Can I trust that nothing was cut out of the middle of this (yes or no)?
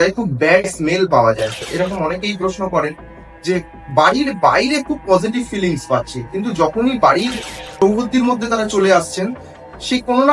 no